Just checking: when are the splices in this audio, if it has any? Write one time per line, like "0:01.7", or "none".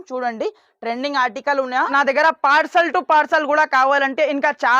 0:01.9